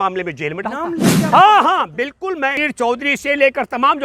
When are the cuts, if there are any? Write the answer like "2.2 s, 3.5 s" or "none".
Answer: 1.2 s, 2.6 s